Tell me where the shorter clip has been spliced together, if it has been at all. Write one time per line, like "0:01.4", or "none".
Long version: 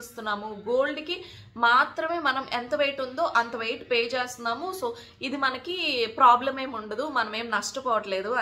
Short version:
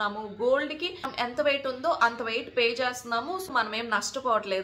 0:01.1
0:03.5